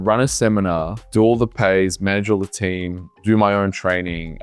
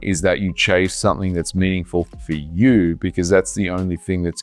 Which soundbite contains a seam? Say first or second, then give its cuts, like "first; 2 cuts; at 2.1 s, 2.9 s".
first; 1 cut; at 1.0 s